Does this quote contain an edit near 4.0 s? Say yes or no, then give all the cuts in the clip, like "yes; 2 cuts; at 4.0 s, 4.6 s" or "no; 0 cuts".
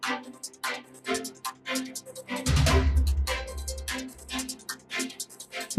no; 2 cuts; at 1.6 s, 2.5 s